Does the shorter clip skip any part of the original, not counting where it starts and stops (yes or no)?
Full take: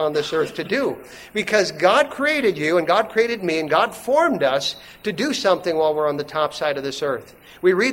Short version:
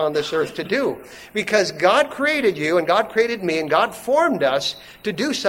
no